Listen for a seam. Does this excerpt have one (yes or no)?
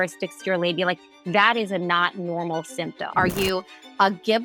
yes